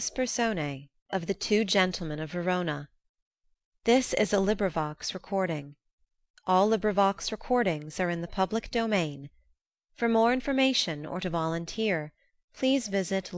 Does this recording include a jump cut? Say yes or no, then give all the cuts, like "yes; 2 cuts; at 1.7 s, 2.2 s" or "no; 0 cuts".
yes; 1 cut; at 0.9 s